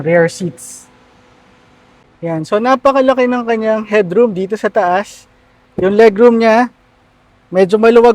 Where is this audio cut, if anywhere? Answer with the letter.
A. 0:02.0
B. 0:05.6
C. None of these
A